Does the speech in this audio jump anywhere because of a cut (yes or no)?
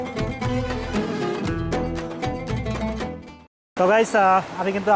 no